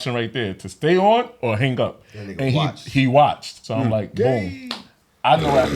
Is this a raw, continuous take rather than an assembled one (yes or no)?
no